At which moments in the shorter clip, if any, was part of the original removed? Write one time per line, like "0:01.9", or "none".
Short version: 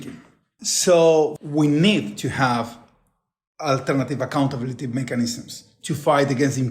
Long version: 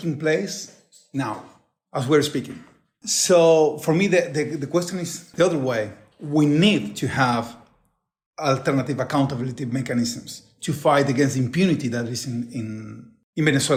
0:01.4